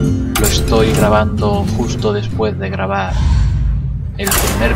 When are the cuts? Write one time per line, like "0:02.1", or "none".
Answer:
0:01.4